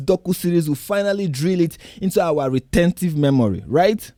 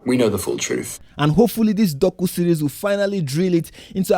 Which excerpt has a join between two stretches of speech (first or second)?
second